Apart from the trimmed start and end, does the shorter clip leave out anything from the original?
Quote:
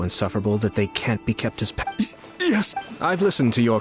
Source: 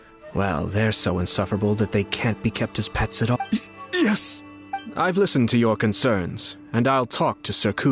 yes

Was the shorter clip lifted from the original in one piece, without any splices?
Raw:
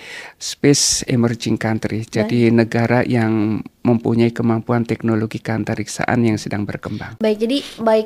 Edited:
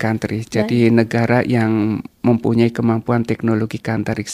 yes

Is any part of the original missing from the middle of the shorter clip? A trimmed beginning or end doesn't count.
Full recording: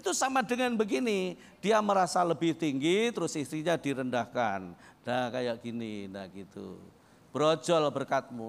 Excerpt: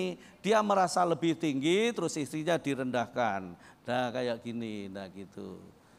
no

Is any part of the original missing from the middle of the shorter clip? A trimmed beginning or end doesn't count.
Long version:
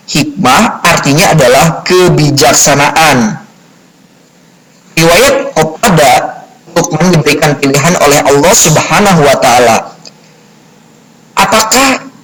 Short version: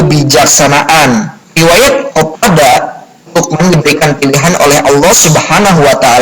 yes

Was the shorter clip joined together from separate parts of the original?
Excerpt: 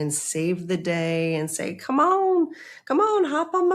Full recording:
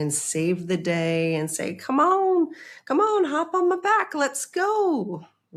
no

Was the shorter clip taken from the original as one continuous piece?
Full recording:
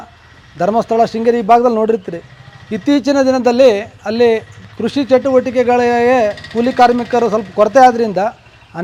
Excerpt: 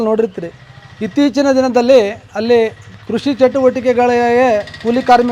yes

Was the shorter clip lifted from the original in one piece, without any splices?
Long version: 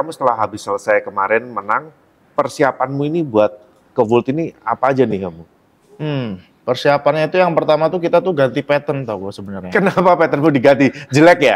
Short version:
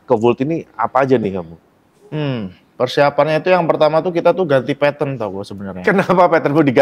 yes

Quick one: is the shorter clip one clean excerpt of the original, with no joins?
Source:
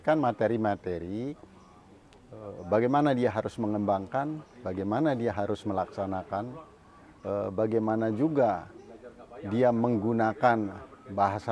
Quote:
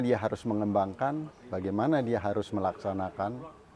yes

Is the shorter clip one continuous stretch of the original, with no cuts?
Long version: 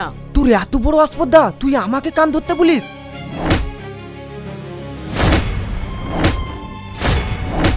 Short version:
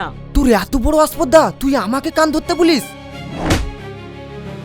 yes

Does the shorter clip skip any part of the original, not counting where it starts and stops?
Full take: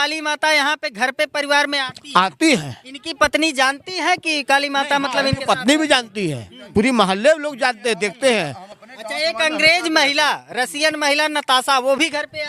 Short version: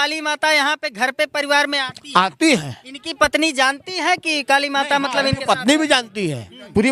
no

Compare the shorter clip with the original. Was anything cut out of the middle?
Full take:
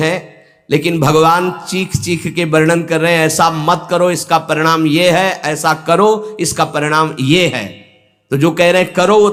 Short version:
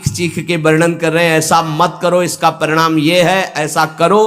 no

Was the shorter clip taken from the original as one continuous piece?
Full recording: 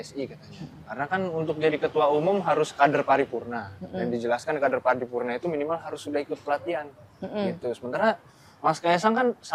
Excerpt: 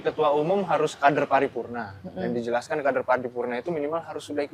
yes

